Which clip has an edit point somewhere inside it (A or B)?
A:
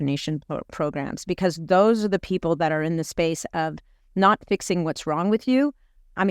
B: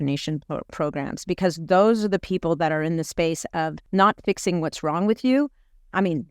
B